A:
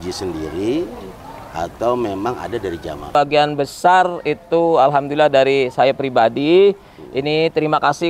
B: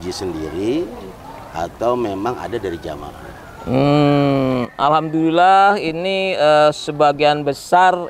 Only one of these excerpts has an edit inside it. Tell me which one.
A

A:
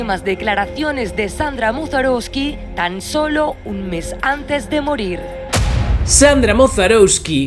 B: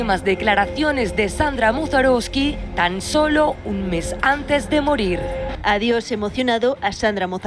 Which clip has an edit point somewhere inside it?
B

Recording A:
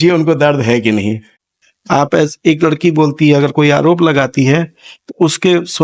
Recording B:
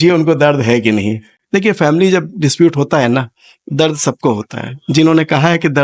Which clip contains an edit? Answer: A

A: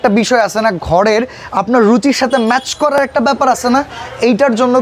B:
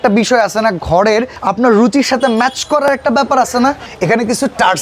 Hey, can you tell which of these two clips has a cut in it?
B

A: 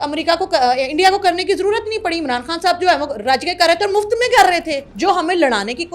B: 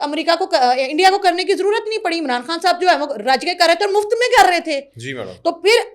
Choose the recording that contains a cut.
A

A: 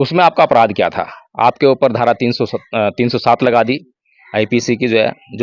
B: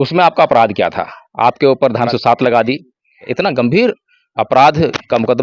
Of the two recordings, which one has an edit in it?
B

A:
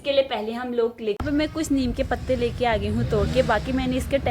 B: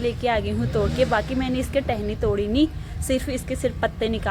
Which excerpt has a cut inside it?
A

